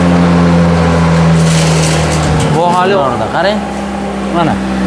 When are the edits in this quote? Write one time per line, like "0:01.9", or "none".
0:03.0